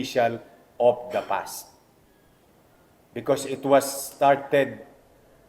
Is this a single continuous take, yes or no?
yes